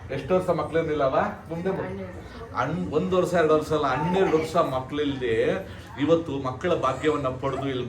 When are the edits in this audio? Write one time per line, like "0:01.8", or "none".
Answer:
none

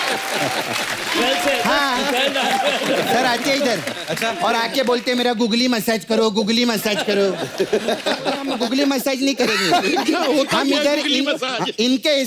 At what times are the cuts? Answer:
0:08.5

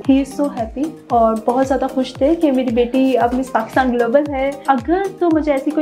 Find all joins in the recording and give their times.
0:01.0
0:04.6

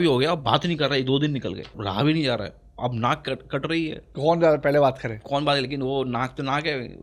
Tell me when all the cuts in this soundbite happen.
0:01.8

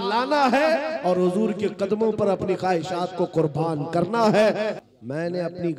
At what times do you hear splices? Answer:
0:04.8

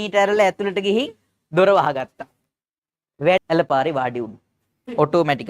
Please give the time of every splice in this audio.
0:03.4

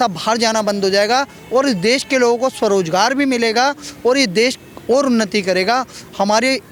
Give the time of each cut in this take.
none

